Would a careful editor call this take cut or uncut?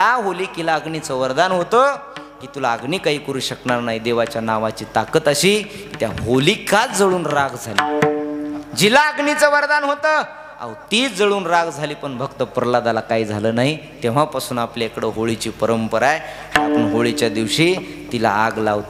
uncut